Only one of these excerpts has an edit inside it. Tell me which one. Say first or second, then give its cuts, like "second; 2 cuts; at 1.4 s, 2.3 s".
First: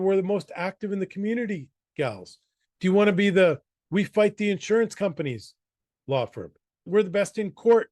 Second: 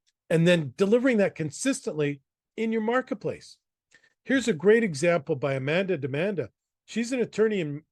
first; 1 cut; at 6.9 s